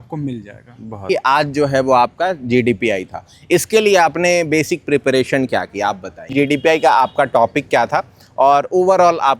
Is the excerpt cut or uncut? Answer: cut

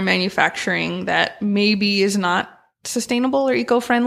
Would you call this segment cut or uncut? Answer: uncut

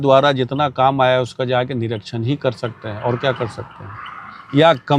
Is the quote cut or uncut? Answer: uncut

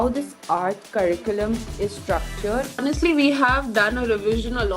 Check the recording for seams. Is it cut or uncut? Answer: cut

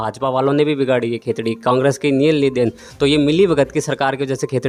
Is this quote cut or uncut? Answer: uncut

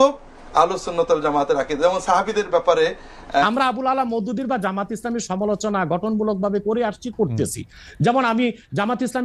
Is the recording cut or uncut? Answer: cut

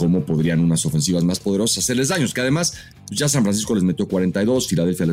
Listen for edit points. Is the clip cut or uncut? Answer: uncut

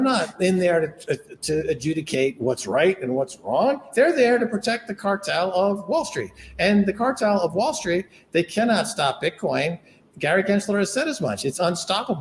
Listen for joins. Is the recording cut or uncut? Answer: cut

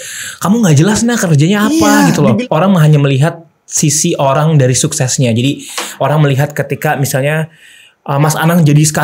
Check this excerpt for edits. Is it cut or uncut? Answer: cut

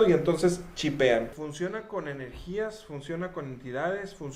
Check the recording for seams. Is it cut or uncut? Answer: cut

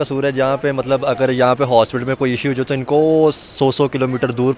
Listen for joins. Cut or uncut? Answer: uncut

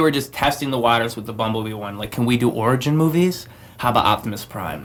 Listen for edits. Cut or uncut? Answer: uncut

